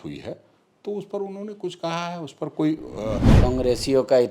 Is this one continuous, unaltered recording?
no; 1 cut; at 3.3 s

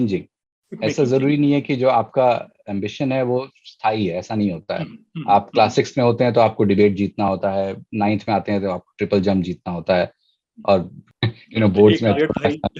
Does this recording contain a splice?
yes; 1 cut; at 11.0 s

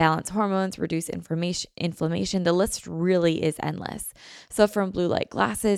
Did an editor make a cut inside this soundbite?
no; 0 cuts

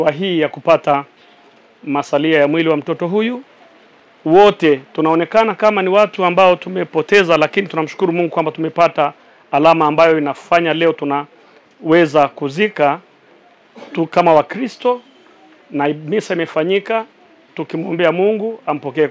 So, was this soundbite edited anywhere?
no; 0 cuts

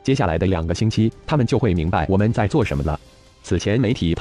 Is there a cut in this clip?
yes; 1 cut; at 3.0 s

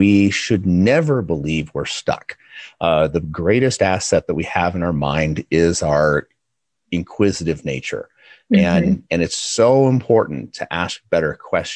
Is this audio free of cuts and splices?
yes; 0 cuts

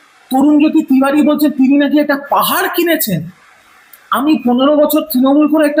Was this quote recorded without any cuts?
yes; 0 cuts

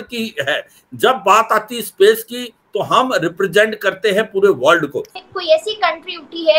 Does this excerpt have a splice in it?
yes; 1 cut; at 5.1 s

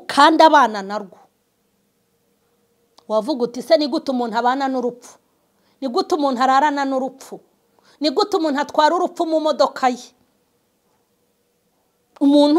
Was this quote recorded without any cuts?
yes; 0 cuts

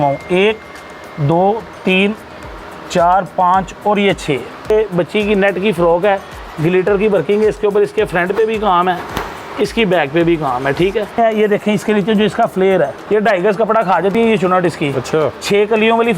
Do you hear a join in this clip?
yes; 3 cuts; at 4.7 s, 11.2 s, 13.0 s

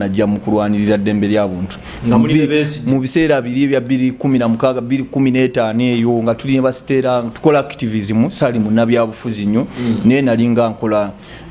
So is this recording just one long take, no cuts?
yes; 0 cuts

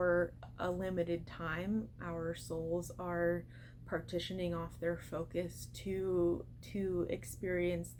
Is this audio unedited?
yes; 0 cuts

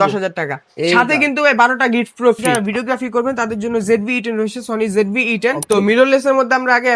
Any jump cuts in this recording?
yes; 2 cuts; at 2.6 s, 5.6 s

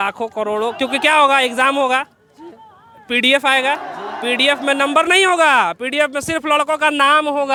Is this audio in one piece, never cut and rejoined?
yes; 0 cuts

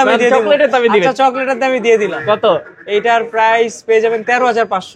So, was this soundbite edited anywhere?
no; 0 cuts

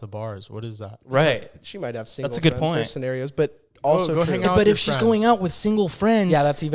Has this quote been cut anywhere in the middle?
no; 0 cuts

